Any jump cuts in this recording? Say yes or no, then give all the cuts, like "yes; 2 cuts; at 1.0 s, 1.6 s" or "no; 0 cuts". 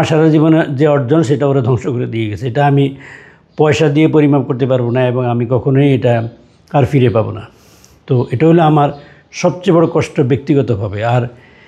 no; 0 cuts